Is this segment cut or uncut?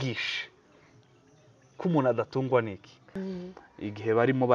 cut